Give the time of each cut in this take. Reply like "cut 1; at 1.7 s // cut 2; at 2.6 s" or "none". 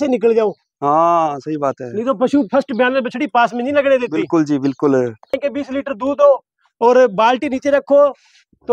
cut 1; at 5.4 s